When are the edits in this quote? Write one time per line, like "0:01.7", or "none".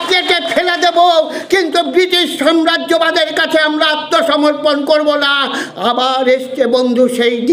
none